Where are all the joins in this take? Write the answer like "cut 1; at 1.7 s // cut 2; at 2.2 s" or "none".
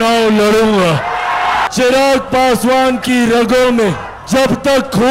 cut 1; at 1.6 s // cut 2; at 4.1 s